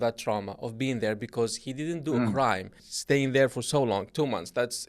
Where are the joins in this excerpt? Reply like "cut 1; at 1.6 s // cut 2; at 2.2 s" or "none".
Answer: cut 1; at 2.9 s